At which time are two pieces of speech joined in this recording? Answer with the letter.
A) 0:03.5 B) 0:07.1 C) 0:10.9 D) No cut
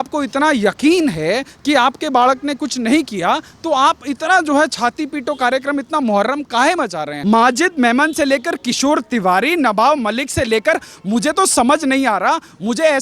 B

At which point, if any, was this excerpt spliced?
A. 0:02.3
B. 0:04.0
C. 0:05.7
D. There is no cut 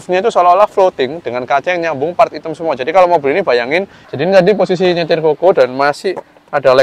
B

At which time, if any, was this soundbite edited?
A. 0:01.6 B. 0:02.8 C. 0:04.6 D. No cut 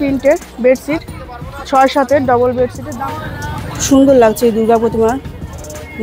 B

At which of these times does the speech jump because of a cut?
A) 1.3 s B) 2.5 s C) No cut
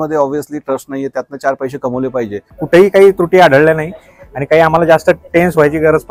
B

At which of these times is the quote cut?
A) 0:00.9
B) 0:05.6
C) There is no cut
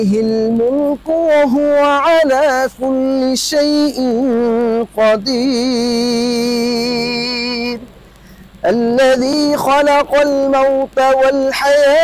C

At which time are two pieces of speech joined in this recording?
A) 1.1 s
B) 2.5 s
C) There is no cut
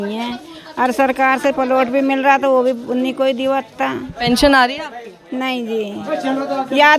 C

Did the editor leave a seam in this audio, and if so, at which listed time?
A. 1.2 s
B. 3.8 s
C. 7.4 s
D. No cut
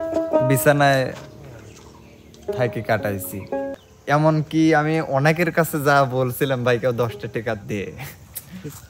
B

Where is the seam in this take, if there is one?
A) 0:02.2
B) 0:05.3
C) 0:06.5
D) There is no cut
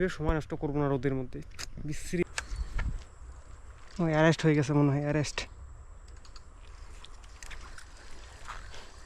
A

